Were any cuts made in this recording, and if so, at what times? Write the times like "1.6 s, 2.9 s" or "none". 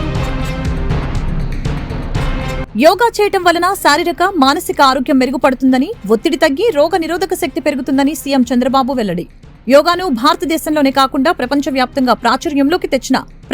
2.6 s

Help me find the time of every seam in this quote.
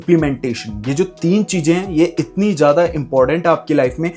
none

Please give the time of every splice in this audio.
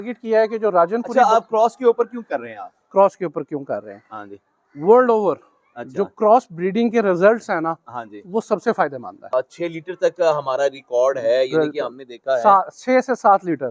9.3 s

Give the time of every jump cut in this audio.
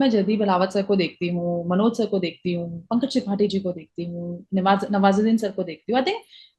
none

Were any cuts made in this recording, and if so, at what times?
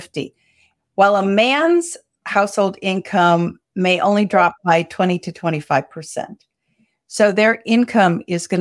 none

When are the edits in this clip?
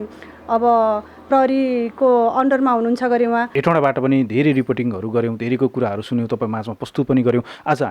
3.5 s

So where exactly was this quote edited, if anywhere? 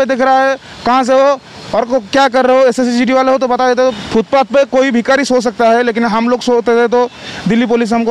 4.0 s

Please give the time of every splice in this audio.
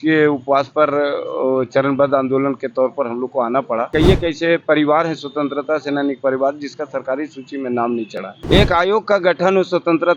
3.9 s, 8.3 s

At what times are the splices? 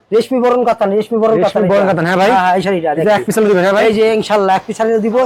none

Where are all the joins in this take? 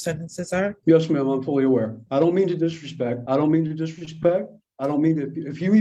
0.8 s, 2.0 s, 3.2 s

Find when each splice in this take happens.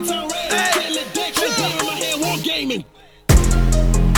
none

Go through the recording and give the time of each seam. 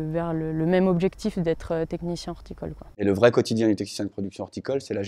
3.0 s

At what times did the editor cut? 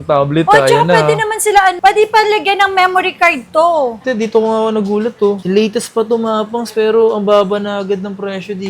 4.0 s

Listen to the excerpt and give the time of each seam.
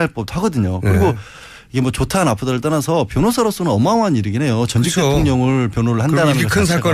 2.1 s

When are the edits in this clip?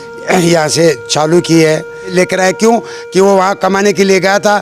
2.4 s

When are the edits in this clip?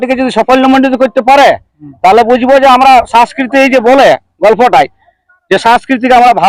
none

